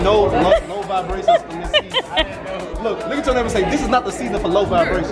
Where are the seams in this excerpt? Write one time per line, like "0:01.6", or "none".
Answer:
none

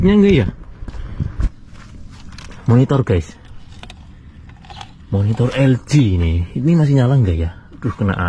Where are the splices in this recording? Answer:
0:01.5

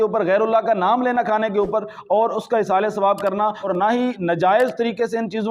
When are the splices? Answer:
0:03.7

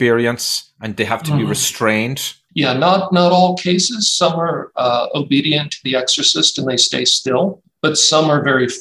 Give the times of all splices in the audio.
0:07.7

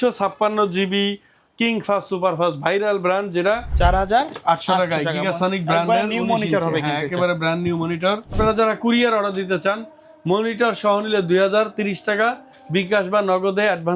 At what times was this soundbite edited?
0:03.7
0:08.4

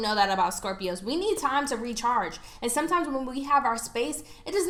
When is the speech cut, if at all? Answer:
none

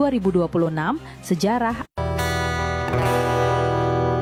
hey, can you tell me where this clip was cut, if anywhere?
none

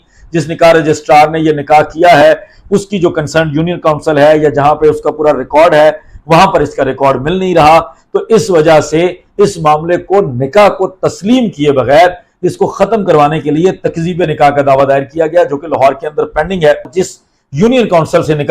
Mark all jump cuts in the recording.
0:16.9

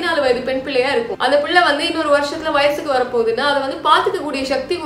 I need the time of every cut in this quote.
0:01.1

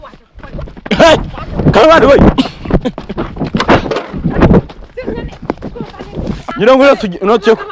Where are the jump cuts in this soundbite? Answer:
0:06.5

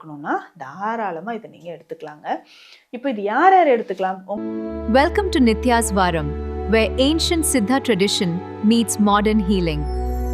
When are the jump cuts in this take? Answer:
0:04.3

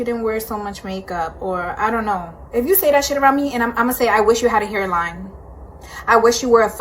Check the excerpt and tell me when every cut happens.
0:01.3

